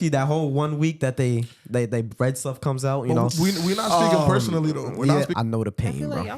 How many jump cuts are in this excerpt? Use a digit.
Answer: 1